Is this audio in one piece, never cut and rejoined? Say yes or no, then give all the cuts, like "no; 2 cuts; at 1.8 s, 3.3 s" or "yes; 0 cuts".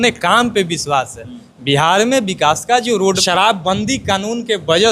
no; 1 cut; at 3.2 s